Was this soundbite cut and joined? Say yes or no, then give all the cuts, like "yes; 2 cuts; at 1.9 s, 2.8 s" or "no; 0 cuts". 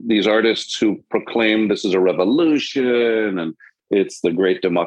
no; 0 cuts